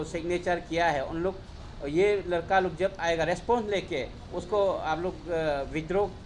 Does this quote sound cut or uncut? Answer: uncut